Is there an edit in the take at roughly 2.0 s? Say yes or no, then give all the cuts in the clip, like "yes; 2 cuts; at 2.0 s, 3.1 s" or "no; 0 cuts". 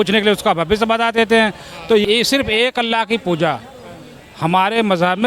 yes; 1 cut; at 2.0 s